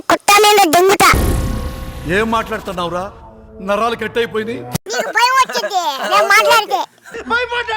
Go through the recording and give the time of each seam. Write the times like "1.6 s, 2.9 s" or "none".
0.9 s, 4.8 s